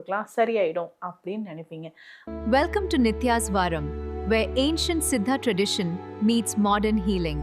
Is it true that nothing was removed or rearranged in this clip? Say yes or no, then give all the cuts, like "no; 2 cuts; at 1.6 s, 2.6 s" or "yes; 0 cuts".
no; 1 cut; at 2.2 s